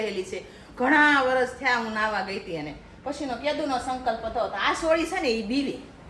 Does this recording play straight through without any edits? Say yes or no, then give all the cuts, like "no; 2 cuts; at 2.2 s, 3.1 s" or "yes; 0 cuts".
yes; 0 cuts